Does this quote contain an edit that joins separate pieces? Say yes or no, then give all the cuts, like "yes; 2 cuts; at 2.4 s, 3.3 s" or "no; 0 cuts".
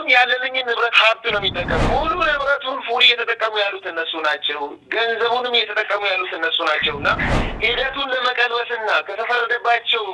yes; 1 cut; at 1.9 s